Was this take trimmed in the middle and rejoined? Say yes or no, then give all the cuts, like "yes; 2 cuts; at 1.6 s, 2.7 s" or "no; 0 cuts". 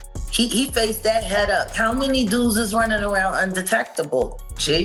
no; 0 cuts